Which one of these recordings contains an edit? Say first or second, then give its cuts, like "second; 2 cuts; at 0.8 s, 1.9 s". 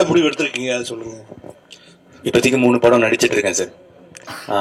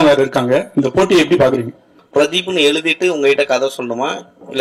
second; 1 cut; at 2.0 s